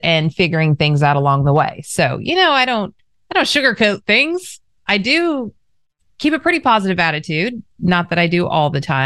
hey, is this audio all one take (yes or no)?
yes